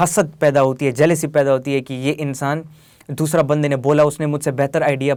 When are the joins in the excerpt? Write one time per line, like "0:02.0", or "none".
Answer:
none